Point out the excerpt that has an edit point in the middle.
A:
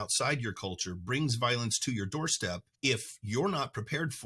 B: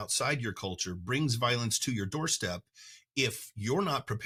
A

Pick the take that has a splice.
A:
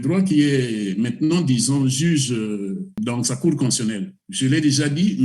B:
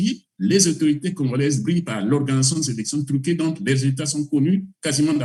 A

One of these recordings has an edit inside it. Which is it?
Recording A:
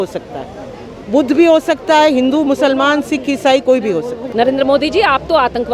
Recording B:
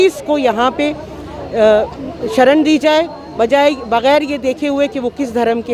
A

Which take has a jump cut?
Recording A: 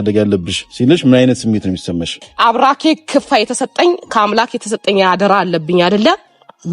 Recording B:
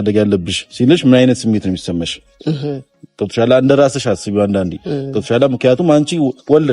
A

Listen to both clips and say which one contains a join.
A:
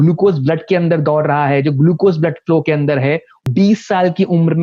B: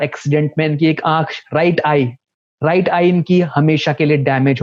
A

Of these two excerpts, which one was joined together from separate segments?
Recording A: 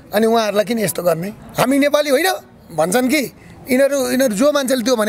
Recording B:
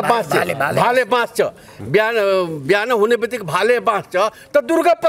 A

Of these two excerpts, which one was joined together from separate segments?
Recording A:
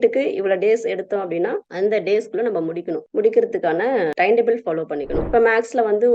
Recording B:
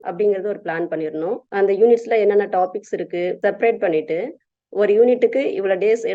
A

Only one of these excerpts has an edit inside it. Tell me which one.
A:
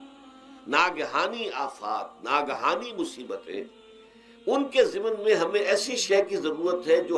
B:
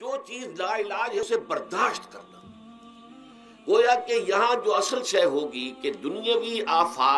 B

